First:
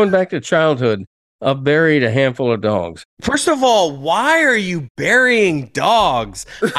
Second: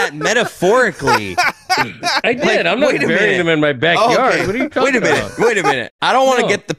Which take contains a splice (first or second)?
first